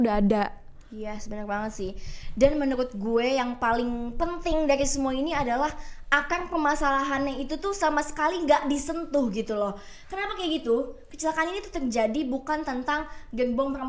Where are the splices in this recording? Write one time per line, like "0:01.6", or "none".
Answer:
none